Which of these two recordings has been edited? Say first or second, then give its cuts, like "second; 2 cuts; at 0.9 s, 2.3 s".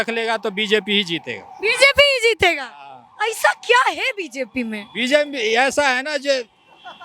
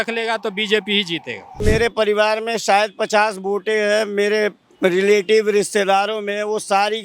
second; 1 cut; at 1.6 s